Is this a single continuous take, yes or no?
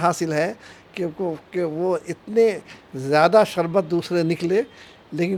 yes